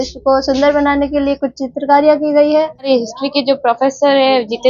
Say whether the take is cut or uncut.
cut